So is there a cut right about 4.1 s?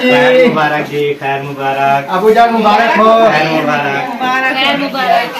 yes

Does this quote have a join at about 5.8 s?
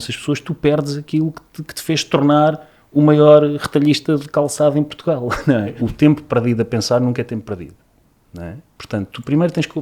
yes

